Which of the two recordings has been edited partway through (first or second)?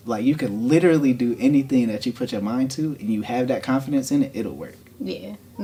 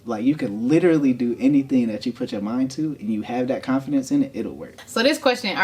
second